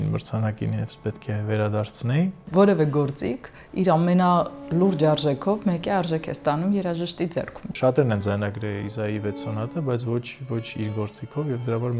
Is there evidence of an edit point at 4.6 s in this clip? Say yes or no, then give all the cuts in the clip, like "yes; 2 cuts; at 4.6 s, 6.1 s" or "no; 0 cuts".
no; 2 cuts; at 2.5 s, 7.7 s